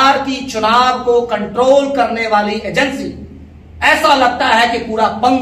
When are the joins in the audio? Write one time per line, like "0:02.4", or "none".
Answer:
none